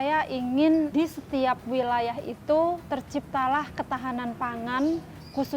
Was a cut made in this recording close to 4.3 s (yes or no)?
no